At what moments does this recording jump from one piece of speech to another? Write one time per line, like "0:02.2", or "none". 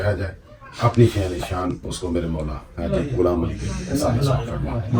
none

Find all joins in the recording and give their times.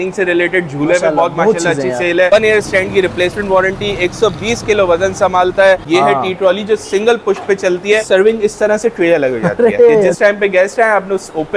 0:02.3
0:05.8
0:08.0
0:10.1

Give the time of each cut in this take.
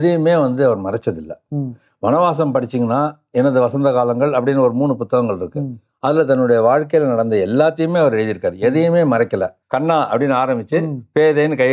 0:09.6

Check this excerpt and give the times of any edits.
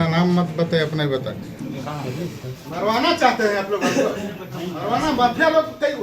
0:01.6

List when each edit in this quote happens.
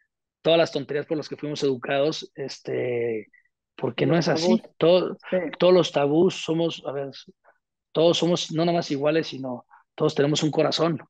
none

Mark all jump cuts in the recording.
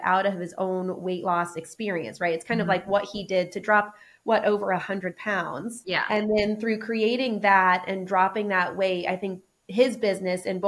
0:05.8

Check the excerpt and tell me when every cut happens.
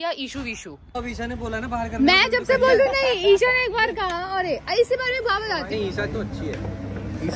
0:00.9
0:05.7

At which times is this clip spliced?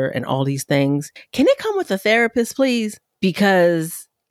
0:01.2
0:03.0

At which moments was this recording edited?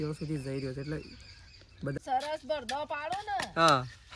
0:02.0

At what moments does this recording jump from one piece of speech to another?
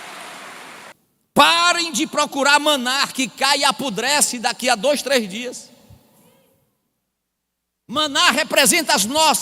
0:00.9

